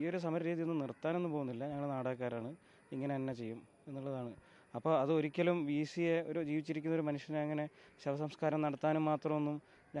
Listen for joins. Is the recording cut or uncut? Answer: uncut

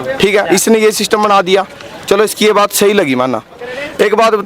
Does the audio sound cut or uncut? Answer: uncut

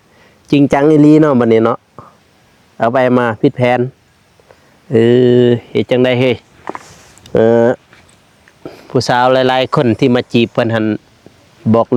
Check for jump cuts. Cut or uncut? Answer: uncut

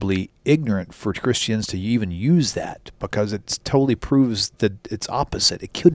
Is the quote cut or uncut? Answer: uncut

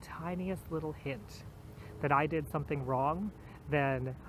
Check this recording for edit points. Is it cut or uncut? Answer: uncut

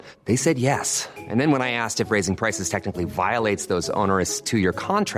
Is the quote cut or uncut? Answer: uncut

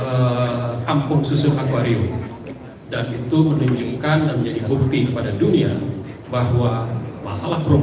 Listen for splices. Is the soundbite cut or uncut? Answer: uncut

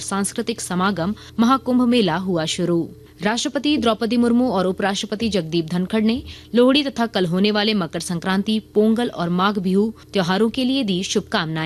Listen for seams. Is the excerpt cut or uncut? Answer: cut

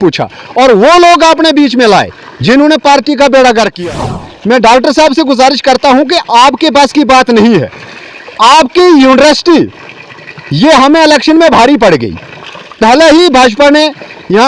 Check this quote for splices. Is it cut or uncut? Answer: cut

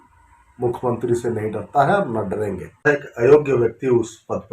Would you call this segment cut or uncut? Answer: cut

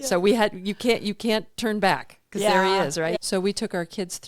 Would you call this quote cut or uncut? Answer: cut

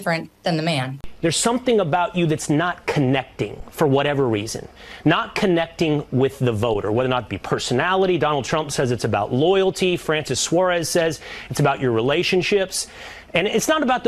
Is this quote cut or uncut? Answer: cut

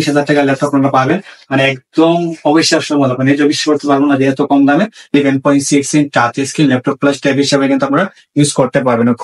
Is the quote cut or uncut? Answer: cut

